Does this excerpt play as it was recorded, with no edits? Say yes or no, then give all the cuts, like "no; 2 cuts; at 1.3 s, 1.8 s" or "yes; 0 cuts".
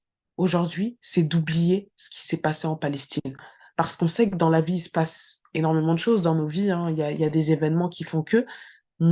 yes; 0 cuts